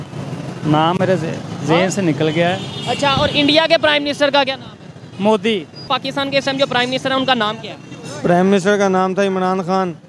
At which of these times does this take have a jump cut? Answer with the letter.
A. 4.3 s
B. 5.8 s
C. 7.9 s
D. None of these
B